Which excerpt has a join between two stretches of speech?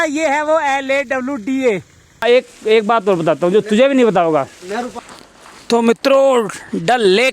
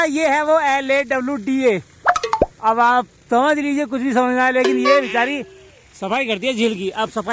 first; 2 cuts; at 2.2 s, 4.9 s

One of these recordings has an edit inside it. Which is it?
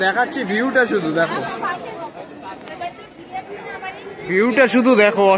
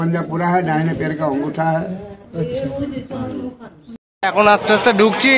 second; 1 cut; at 4.1 s

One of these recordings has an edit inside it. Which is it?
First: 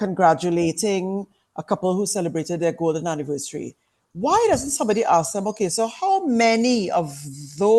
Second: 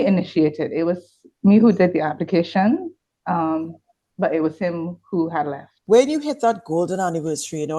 second; 1 cut; at 5.7 s

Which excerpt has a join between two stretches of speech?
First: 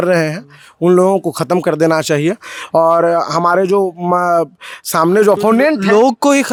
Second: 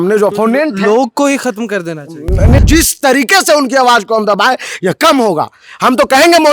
second; 1 cut; at 2.6 s

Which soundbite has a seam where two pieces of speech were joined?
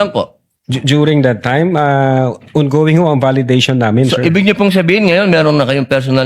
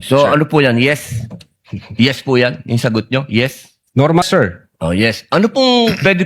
second; 1 cut; at 4.2 s

